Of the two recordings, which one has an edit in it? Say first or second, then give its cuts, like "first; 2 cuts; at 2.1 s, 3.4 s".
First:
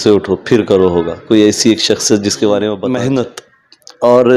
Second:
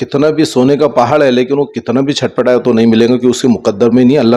first; 1 cut; at 2.9 s